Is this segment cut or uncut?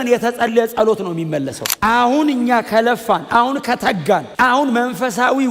cut